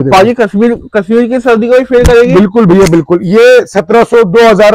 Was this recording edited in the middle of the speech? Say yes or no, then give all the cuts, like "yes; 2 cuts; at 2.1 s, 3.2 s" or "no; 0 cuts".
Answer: no; 0 cuts